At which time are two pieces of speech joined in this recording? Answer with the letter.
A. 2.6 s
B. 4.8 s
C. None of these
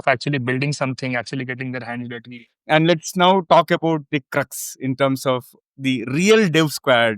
A